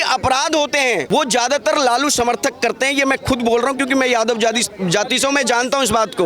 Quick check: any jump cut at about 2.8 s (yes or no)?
no